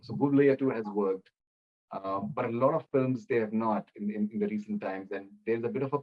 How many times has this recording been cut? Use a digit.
0